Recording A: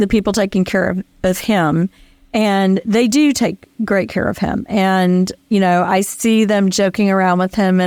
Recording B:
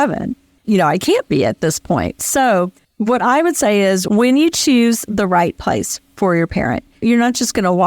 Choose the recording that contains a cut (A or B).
B